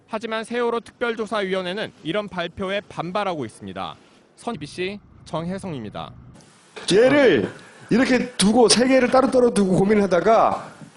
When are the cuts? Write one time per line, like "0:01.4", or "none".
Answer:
none